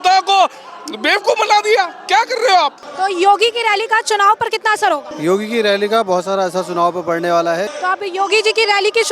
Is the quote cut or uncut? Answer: cut